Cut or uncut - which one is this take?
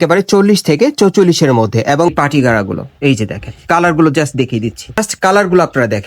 cut